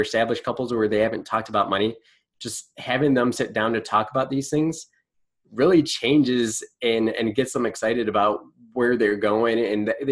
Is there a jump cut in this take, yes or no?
no